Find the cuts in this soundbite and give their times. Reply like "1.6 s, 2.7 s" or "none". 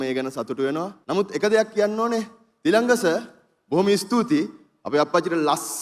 1.0 s